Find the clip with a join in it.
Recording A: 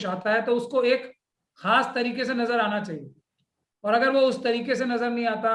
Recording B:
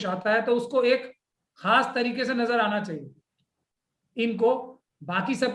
B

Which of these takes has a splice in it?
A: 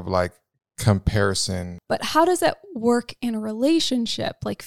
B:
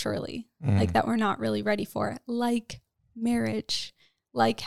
A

